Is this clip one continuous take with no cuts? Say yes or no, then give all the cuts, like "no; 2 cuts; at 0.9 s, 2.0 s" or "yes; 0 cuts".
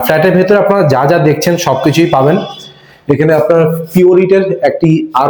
yes; 0 cuts